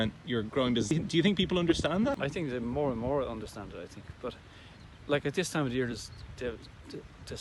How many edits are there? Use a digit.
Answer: 2